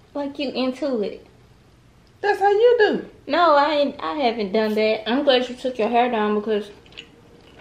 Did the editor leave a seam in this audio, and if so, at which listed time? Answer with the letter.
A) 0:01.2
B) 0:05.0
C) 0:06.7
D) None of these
B